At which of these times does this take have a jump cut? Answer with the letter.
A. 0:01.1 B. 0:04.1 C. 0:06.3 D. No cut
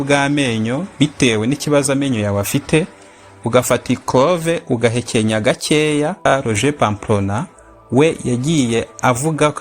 C